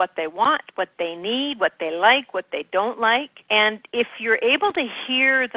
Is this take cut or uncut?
uncut